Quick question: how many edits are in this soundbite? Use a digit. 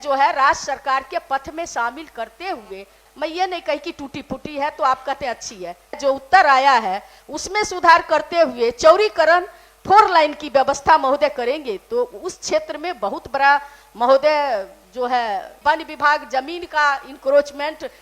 3